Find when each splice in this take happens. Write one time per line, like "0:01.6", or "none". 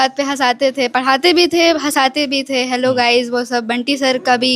none